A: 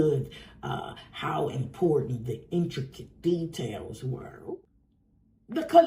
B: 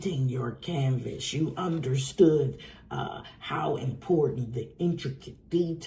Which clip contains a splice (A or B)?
A